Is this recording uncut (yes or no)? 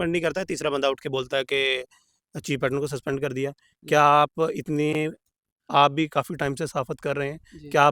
yes